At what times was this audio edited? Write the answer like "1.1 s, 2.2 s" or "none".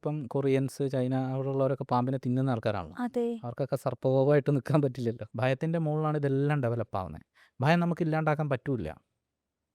5.3 s